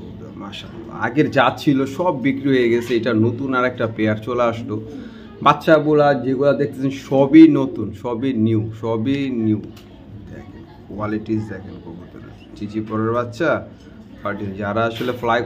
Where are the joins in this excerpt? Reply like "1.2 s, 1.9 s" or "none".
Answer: none